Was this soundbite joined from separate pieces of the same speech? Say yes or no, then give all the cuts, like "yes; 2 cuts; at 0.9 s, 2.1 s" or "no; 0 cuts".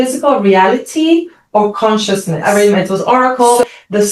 yes; 1 cut; at 2.4 s